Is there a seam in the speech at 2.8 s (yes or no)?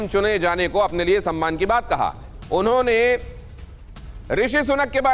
no